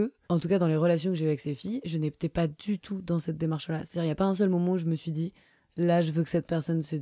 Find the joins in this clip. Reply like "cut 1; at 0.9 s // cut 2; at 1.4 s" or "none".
none